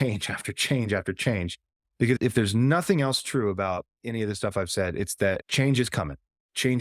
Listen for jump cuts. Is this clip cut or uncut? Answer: cut